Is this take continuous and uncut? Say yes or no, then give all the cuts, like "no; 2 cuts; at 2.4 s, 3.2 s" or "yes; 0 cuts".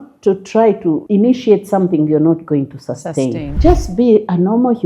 no; 2 cuts; at 1.0 s, 3.5 s